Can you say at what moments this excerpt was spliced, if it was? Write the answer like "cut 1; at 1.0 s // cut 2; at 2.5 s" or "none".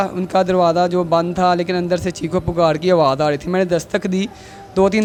none